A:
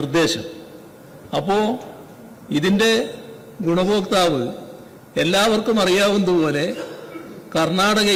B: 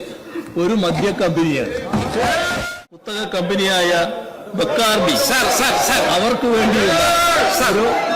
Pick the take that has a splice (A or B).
B